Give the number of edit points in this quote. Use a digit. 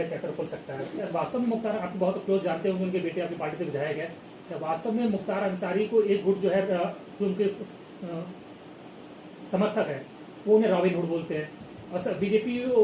1